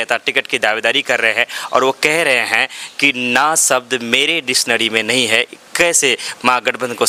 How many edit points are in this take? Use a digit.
0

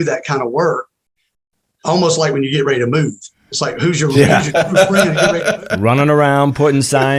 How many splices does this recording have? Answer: 0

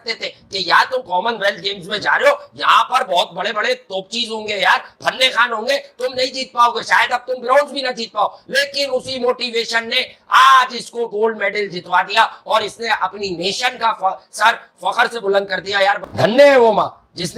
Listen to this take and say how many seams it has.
1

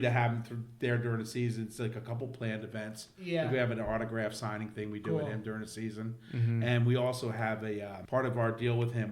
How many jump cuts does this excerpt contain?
1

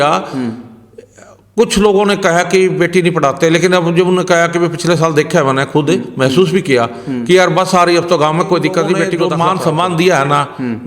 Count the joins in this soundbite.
1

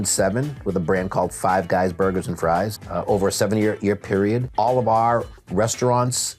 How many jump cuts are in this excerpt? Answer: 2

